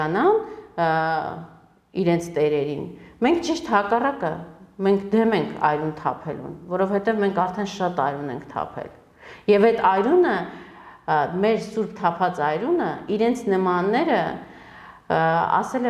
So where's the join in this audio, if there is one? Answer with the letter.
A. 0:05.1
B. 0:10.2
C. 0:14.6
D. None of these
D